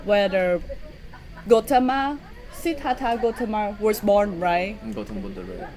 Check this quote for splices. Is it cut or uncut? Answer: uncut